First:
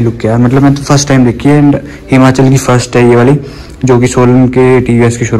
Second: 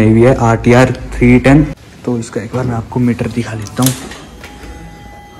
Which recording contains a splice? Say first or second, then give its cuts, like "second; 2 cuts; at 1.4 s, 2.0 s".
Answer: second; 1 cut; at 1.9 s